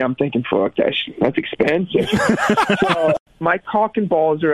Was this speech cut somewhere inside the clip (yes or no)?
yes